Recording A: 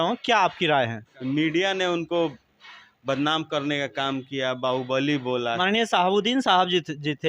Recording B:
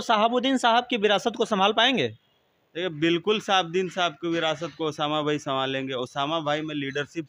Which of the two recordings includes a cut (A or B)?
A